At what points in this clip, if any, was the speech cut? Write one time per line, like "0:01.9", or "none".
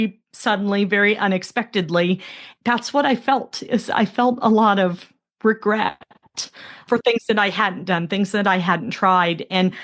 0:02.4
0:06.8